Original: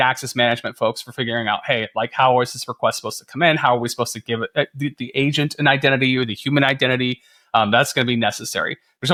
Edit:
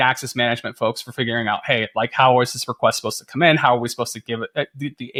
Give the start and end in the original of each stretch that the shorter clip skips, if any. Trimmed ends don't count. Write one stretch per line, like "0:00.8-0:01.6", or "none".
none